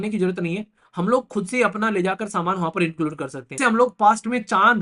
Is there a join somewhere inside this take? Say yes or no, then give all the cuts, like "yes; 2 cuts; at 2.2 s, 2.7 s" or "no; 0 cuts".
yes; 1 cut; at 3.6 s